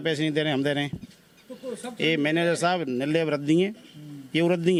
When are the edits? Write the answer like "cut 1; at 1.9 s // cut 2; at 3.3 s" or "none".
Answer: none